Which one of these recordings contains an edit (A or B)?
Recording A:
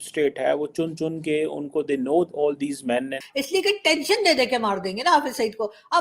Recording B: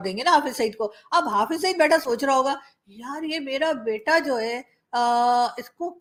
A